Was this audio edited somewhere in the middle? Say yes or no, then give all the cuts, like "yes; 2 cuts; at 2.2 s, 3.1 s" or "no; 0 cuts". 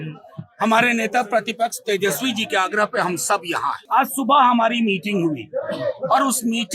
yes; 1 cut; at 3.8 s